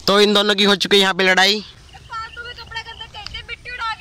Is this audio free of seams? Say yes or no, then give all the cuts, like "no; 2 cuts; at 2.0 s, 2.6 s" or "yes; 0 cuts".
yes; 0 cuts